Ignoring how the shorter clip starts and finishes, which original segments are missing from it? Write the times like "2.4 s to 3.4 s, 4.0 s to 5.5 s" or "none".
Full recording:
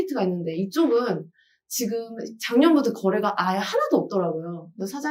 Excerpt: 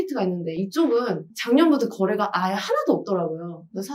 1.3 s to 2.4 s

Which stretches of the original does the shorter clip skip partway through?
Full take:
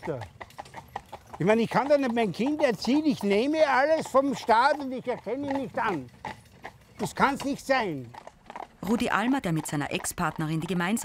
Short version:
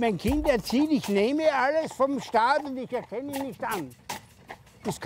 none

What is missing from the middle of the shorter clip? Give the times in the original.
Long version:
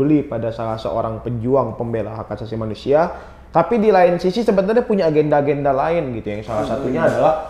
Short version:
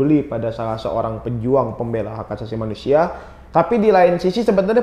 none

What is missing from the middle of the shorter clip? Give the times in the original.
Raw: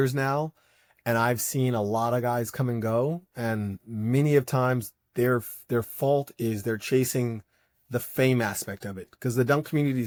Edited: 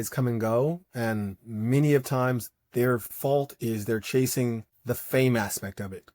5.6 s to 5.9 s, 7.5 s to 7.7 s

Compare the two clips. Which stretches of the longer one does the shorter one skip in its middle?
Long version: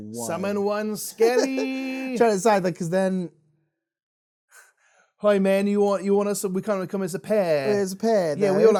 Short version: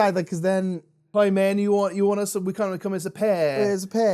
3.4 s to 5.0 s

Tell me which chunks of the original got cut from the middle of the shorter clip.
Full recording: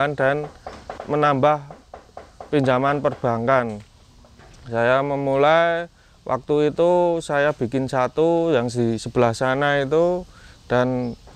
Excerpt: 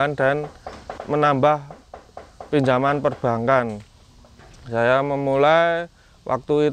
none

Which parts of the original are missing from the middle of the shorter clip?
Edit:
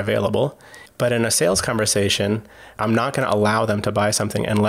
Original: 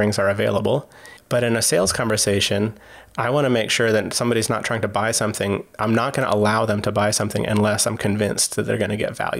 3.0 s to 5.7 s

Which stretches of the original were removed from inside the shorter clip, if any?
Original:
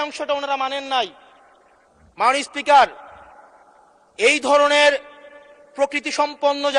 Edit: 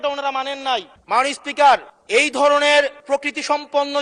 1.2 s to 2.0 s, 3.0 s to 4.0 s, 5.1 s to 5.7 s

